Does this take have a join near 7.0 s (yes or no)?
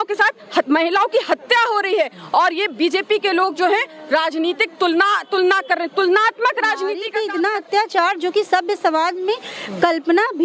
yes